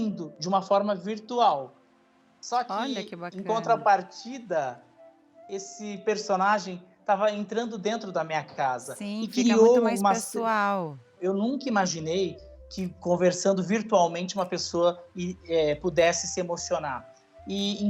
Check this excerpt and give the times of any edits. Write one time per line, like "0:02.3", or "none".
0:11.2